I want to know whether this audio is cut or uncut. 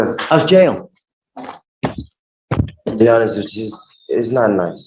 uncut